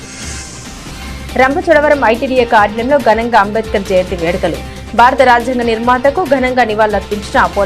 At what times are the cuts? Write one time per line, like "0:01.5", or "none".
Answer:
0:01.3